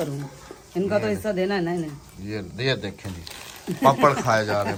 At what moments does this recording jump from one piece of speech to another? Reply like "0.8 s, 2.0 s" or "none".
none